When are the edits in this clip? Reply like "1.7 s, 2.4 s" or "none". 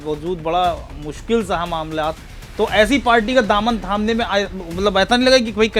none